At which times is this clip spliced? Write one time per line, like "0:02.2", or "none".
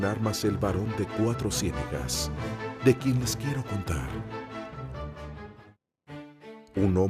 0:02.0